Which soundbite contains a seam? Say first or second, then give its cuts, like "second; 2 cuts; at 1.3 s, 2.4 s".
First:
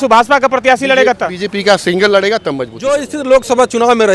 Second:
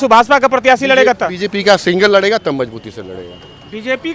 first; 1 cut; at 3.1 s